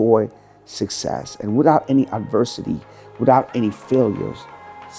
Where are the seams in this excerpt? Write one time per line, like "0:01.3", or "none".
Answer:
none